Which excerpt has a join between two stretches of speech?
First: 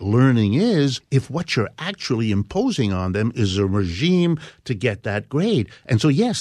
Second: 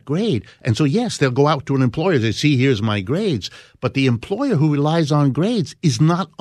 first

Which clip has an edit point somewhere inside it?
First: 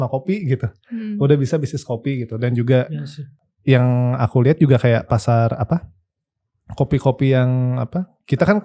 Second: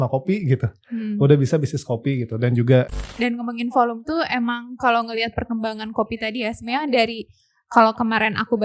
second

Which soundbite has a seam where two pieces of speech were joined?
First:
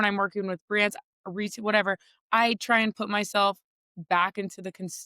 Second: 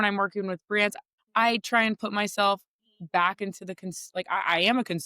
second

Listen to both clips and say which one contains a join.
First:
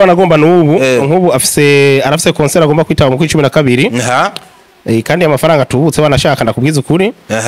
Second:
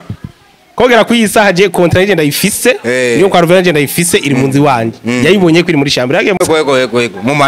second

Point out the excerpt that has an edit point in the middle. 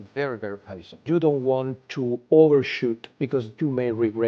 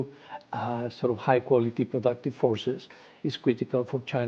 first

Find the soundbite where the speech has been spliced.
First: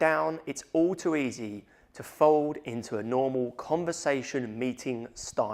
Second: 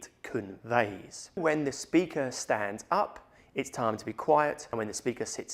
second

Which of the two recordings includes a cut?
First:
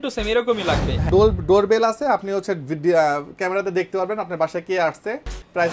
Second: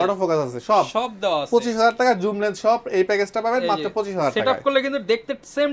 first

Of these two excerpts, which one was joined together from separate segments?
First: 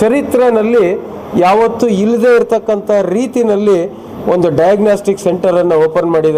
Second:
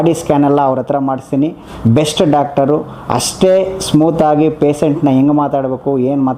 second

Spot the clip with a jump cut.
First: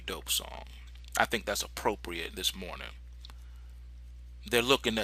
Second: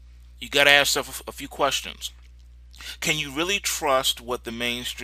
second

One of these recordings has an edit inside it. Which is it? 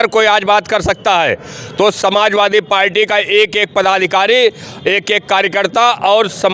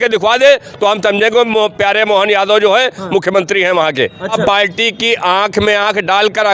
second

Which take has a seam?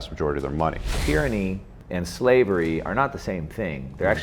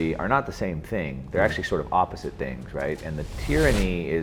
first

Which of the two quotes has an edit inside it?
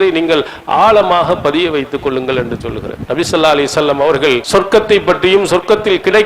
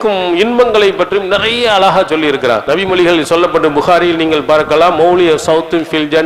first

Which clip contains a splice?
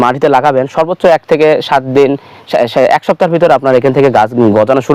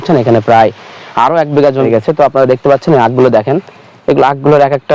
second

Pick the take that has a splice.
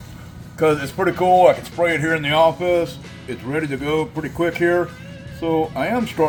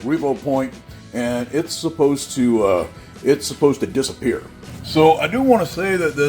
second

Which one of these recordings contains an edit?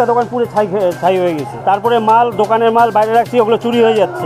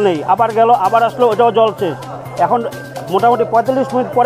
first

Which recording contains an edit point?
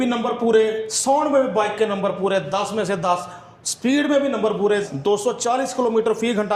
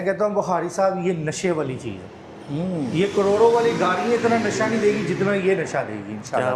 first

